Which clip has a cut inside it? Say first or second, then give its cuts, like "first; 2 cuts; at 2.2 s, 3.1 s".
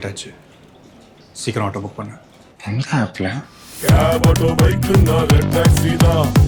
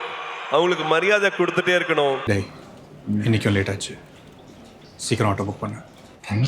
second; 1 cut; at 2.2 s